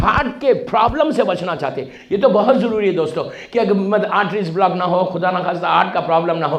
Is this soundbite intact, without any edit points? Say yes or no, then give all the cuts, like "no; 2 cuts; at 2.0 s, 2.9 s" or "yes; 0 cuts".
yes; 0 cuts